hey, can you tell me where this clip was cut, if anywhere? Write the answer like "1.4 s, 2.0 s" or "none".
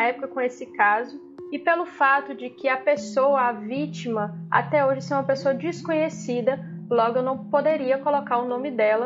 none